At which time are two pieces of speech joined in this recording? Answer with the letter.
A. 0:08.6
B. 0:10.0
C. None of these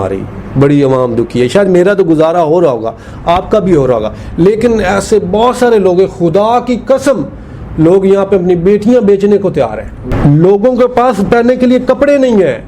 B